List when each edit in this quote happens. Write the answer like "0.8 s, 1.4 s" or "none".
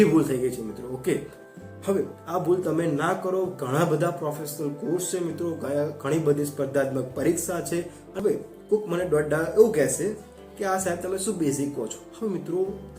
8.0 s